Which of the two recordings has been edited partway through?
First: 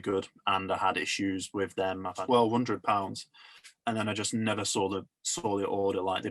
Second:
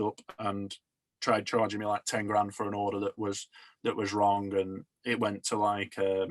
first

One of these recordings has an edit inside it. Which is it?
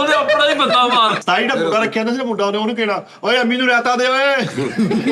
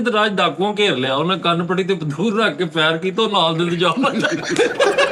first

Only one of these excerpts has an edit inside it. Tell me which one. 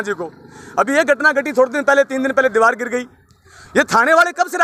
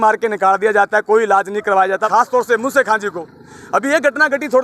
second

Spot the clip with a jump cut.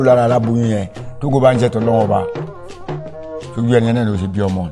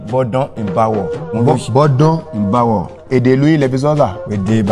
second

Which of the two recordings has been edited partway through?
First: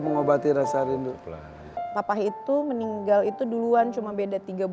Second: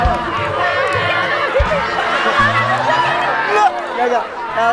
first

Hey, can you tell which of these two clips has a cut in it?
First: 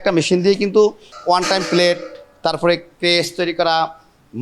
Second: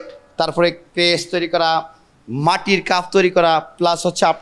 first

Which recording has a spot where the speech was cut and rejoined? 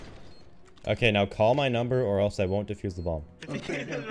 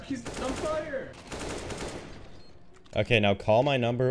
second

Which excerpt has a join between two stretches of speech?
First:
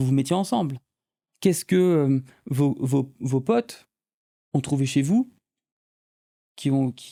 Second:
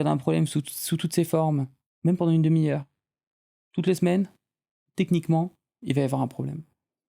second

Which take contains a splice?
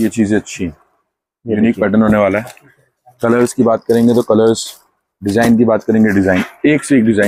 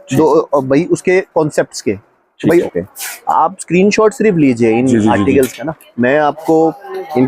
second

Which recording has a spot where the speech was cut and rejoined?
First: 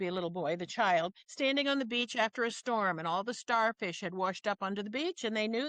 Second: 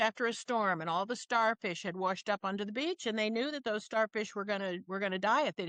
first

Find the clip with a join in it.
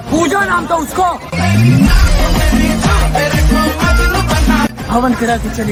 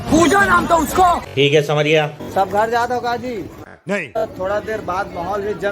second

